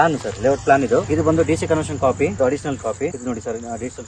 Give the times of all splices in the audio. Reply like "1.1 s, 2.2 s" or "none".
1.1 s, 2.4 s